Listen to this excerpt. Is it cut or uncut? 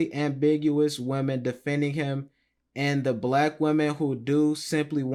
uncut